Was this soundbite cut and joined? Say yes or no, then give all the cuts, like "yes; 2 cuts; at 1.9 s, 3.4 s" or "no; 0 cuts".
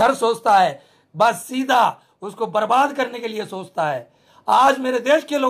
no; 0 cuts